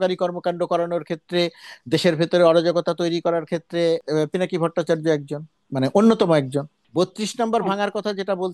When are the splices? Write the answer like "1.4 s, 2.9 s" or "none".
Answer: 5.6 s, 6.8 s